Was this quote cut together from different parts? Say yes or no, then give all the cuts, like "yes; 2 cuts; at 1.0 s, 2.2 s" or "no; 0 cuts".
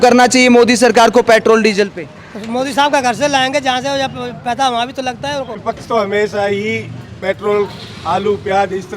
yes; 1 cut; at 5.6 s